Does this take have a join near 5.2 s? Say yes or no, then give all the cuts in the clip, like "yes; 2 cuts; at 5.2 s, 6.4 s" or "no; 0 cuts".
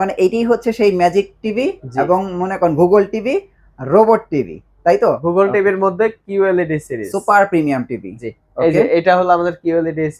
yes; 1 cut; at 5.2 s